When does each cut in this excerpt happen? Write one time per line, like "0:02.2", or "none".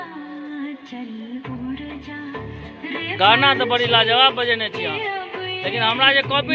none